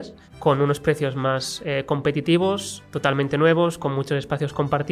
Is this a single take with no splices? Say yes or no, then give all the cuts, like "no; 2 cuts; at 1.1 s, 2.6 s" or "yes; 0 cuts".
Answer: yes; 0 cuts